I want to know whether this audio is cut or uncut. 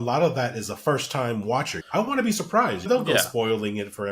cut